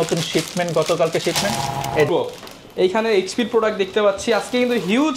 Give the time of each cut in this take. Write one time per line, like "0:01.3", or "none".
0:02.1